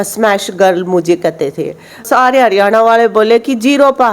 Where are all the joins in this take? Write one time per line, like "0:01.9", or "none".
0:02.0